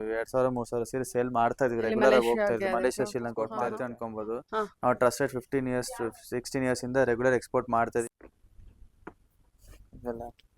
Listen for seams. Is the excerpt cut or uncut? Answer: cut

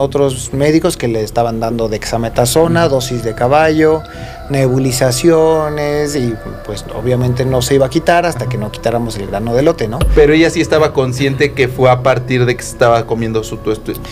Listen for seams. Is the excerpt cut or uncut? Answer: uncut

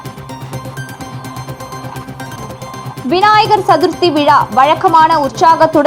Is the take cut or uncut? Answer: cut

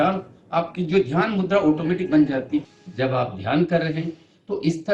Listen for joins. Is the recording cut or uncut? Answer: cut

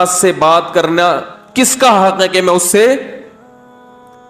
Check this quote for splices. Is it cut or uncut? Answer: cut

